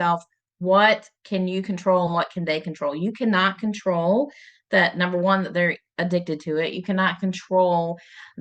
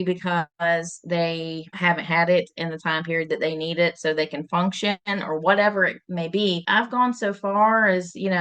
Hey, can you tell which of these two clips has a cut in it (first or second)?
second